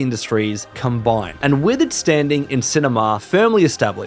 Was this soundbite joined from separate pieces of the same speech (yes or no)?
no